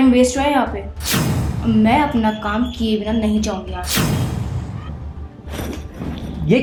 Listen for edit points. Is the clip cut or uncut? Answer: uncut